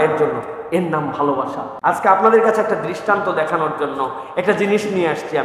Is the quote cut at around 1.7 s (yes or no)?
yes